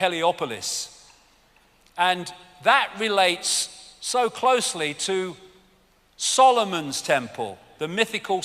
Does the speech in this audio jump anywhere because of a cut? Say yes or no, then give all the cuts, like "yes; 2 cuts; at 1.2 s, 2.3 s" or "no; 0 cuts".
yes; 1 cut; at 4.3 s